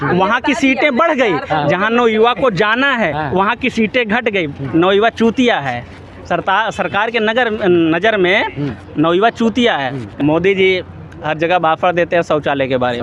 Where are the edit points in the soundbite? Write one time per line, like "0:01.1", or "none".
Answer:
0:10.1